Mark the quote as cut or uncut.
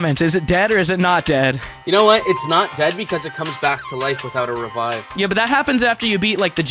cut